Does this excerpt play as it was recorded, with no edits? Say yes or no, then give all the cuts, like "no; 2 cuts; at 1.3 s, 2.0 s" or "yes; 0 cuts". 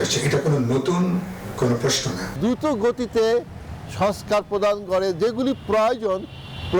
no; 1 cut; at 2.3 s